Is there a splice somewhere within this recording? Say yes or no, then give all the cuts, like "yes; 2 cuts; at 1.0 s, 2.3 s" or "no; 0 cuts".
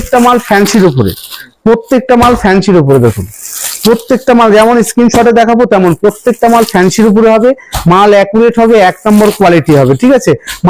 no; 0 cuts